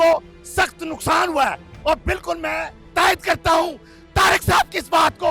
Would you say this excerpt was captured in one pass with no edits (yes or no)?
yes